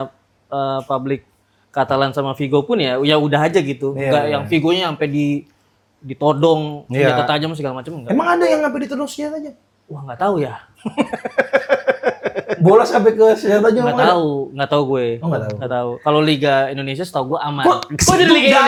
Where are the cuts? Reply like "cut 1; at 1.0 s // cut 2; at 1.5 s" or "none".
none